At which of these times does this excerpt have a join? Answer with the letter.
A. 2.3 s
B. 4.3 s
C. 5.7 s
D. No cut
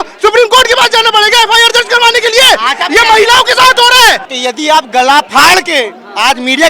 B